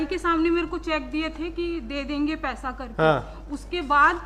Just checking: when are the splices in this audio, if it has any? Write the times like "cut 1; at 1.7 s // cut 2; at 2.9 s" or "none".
none